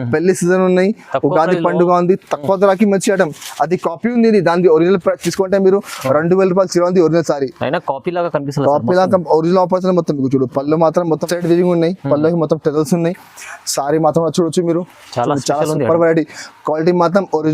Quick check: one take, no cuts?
no; 1 cut; at 11.2 s

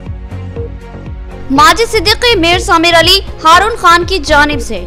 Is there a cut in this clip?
yes; 1 cut; at 1.4 s

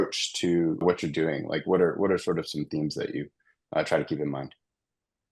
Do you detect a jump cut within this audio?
no; 0 cuts

